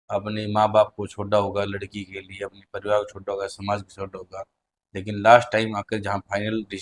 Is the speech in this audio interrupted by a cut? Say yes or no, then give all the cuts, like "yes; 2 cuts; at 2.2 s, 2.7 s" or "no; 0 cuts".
no; 0 cuts